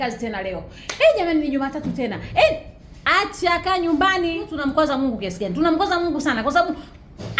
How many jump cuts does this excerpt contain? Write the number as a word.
one